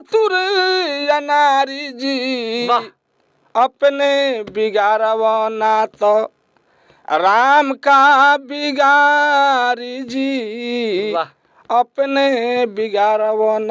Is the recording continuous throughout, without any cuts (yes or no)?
yes